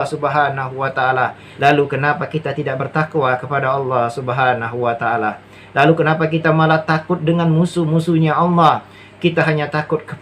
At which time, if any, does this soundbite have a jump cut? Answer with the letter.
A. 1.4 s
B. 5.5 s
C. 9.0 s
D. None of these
A